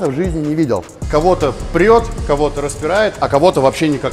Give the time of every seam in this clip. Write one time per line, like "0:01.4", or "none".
0:00.9